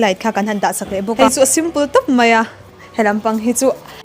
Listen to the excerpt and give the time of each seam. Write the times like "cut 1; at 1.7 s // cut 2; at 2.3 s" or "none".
cut 1; at 1.1 s